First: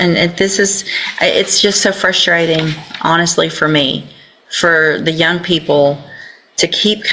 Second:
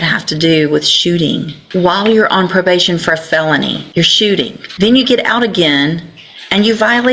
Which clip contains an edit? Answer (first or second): second